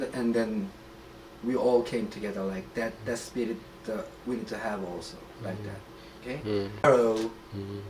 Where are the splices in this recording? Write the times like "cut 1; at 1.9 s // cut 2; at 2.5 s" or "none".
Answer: cut 1; at 6.9 s